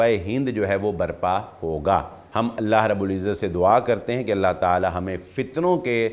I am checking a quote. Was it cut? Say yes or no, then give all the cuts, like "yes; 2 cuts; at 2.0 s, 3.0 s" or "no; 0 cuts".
yes; 1 cut; at 2.2 s